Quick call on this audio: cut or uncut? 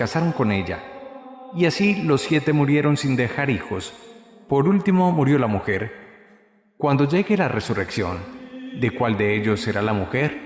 uncut